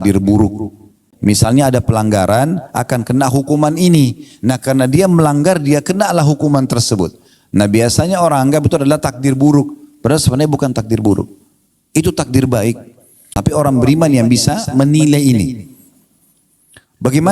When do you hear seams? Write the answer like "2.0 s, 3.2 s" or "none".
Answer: 1.0 s, 13.2 s